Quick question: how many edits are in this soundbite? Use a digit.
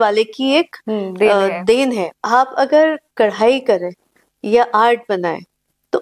1